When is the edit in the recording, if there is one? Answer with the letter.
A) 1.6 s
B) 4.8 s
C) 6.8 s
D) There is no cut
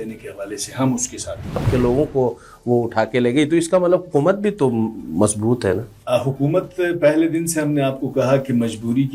A